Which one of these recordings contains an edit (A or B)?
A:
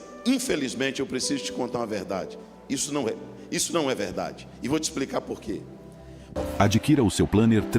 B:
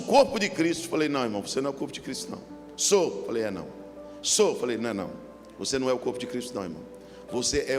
A